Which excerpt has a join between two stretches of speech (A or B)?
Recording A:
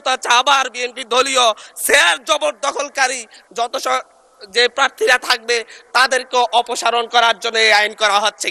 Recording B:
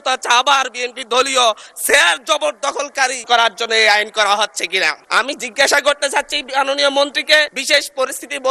B